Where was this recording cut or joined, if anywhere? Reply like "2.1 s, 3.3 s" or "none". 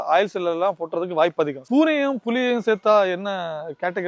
1.6 s